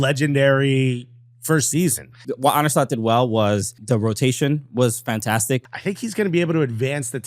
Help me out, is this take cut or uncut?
cut